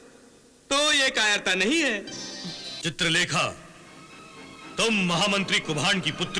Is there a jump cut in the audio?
yes; 1 cut; at 2.7 s

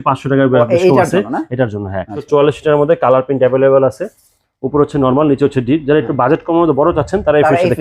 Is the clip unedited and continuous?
no; 1 cut; at 2.2 s

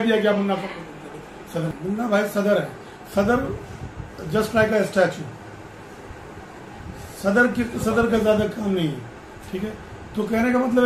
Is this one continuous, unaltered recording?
no; 1 cut; at 1.7 s

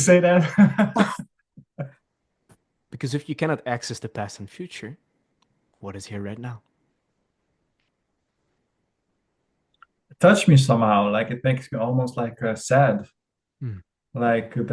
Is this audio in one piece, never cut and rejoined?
no; 1 cut; at 1.9 s

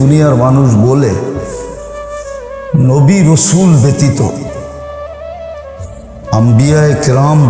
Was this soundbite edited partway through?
no; 0 cuts

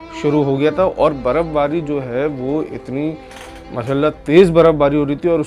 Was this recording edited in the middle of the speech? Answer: no; 0 cuts

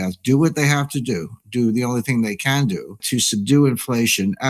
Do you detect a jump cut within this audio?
yes; 1 cut; at 3.0 s

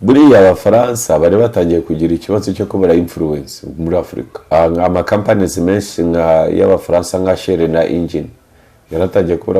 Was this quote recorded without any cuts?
no; 1 cut; at 4.4 s

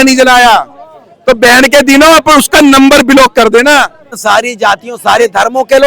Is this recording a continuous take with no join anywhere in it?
no; 1 cut; at 4.1 s

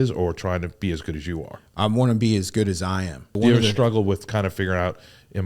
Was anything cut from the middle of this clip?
yes; 1 cut; at 3.4 s

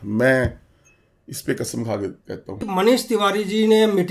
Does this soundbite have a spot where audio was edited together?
yes; 1 cut; at 2.7 s

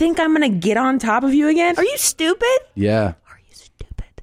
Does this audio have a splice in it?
yes; 1 cut; at 1.7 s

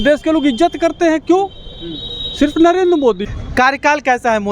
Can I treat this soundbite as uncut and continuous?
no; 1 cut; at 3.3 s

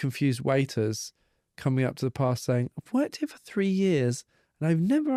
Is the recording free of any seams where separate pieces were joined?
yes; 0 cuts

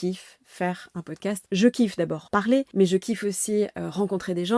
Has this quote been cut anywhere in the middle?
yes; 2 cuts; at 1.4 s, 2.4 s

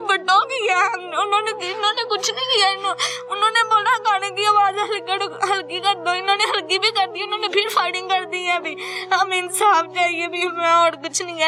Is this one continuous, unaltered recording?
yes; 0 cuts

